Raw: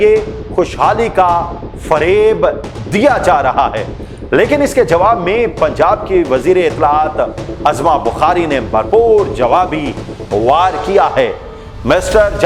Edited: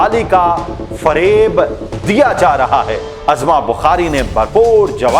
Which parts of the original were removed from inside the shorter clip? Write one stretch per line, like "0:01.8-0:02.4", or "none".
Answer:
0:03.9-0:07.4